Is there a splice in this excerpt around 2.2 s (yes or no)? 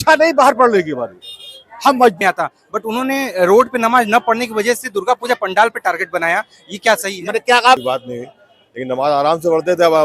yes